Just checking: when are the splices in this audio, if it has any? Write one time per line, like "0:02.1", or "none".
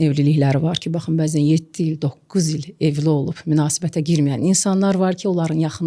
none